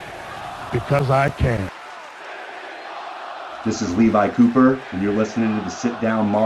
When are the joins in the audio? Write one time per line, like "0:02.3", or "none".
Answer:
0:01.7
0:03.6